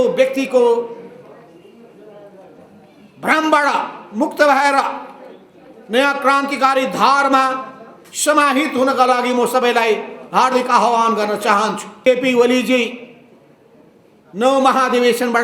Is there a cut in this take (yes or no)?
yes